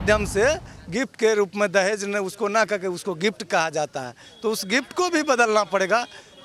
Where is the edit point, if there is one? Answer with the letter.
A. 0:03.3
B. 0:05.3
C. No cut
C